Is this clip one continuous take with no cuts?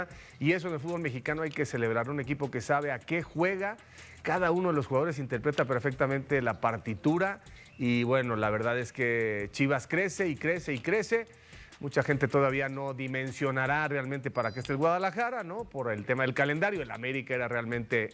yes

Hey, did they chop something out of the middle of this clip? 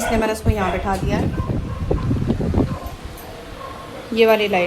no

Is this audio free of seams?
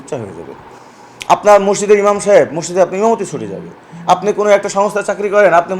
yes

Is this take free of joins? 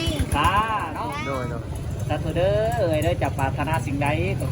no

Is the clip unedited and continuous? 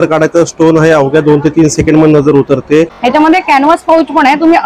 no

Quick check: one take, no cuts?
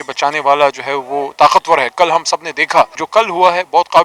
no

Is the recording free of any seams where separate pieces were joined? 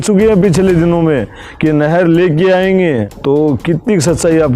no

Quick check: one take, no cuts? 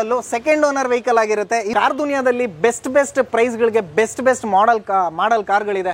no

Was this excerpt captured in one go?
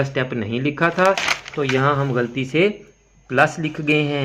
yes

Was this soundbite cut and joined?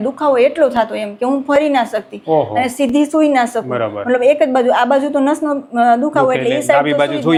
no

